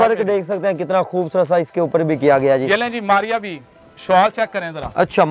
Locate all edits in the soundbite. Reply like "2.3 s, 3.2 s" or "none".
none

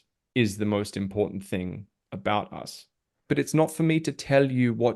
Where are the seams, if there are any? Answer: 3.2 s

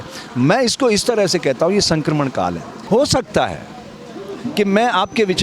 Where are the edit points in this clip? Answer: 2.7 s

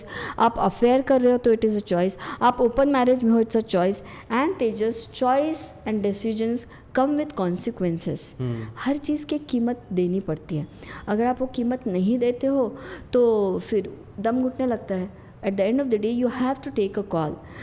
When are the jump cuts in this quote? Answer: none

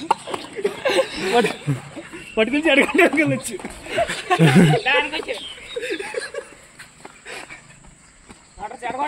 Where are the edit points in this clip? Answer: none

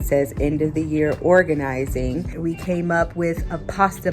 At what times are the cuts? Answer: 2.3 s

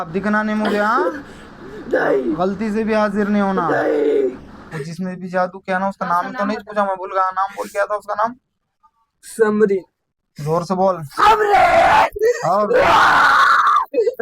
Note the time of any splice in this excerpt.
4.5 s

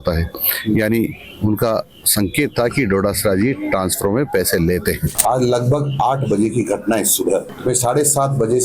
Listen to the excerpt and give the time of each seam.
5.1 s, 7.5 s

